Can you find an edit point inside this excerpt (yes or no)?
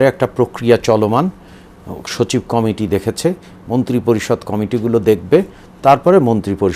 no